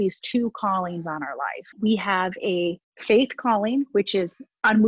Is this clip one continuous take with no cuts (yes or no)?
no